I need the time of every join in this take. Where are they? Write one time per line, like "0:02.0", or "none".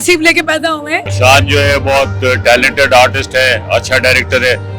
0:01.0